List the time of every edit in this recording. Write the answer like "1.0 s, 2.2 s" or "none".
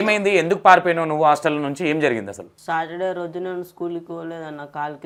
none

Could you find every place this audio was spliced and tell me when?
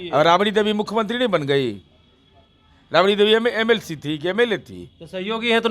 none

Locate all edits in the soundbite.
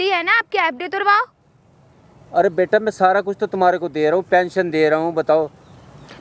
none

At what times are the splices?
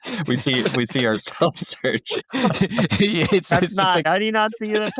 4.1 s

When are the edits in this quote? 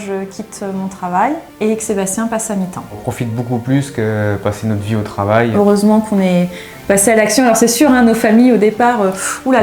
1.5 s, 3.1 s, 5.5 s

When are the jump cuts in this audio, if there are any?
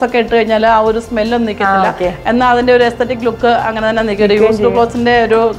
none

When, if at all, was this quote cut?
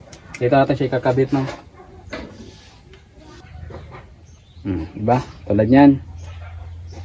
3.4 s

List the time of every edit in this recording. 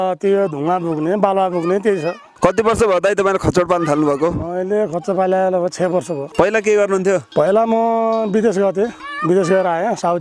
2.2 s, 6.2 s, 7.3 s, 9.0 s

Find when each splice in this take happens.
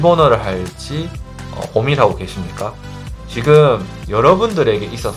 none

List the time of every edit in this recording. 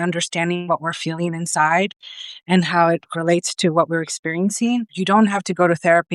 3.1 s, 5.0 s

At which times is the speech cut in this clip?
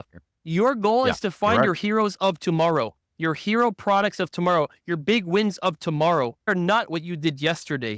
6.5 s

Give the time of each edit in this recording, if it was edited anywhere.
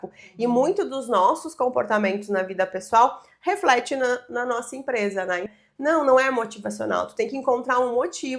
5.1 s

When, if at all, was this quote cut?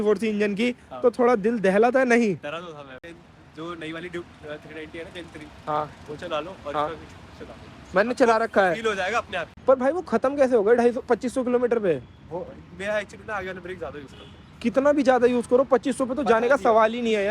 3.0 s, 9.4 s

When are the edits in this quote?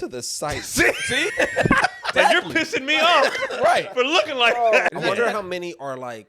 1.3 s, 2.1 s, 4.9 s

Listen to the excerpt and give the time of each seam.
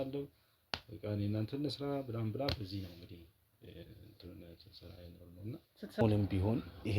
6.0 s

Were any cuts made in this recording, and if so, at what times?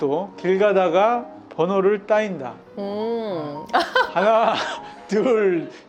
none

